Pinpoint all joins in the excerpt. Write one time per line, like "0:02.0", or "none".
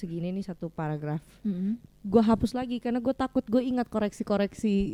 none